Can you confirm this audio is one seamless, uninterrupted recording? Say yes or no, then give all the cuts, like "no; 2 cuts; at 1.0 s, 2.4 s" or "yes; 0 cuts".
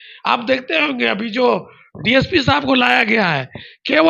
yes; 0 cuts